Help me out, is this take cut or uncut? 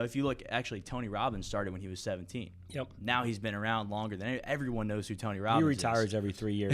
uncut